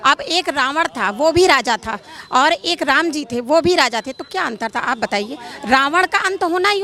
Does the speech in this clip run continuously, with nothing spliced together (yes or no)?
yes